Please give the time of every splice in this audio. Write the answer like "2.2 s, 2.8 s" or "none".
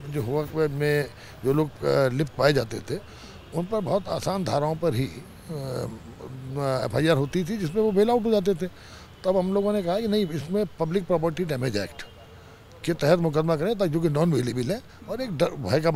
none